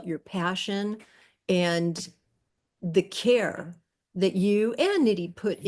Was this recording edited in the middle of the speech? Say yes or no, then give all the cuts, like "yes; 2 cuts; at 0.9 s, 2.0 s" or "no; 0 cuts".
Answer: no; 0 cuts